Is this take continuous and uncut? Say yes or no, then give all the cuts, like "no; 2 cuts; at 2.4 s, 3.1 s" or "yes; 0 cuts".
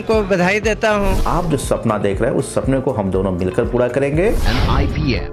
no; 2 cuts; at 1.2 s, 4.4 s